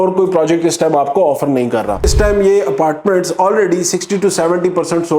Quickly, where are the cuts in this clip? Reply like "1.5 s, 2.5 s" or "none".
2.1 s